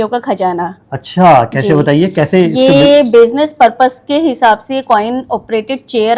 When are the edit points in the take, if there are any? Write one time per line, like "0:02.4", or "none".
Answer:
none

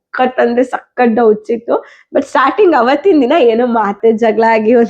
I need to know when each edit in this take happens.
0:04.0

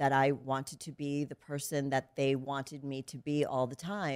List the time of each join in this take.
none

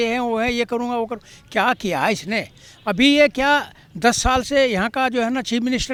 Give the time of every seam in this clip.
none

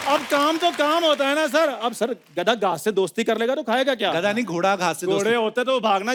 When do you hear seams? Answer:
none

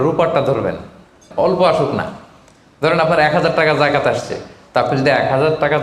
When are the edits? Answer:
0:01.3

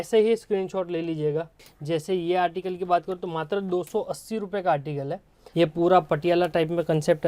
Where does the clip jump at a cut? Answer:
0:01.6
0:05.4

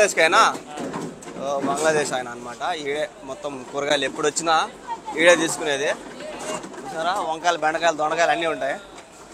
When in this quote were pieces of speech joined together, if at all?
none

